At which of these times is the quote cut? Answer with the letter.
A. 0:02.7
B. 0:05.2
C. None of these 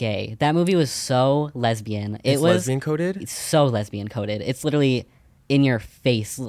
C